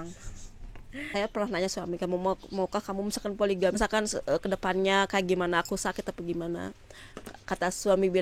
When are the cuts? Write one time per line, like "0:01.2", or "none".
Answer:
0:01.1
0:03.8